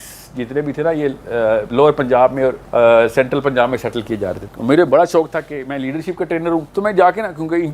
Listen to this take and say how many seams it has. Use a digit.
3